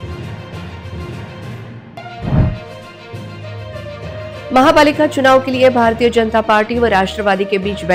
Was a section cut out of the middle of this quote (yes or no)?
no